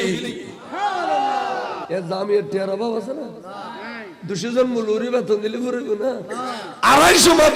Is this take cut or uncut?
cut